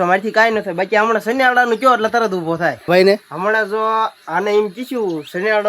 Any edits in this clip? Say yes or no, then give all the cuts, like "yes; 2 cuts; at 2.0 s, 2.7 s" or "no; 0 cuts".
yes; 1 cut; at 2.9 s